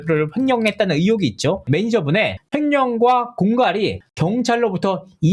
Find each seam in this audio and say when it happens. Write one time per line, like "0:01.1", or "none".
0:01.7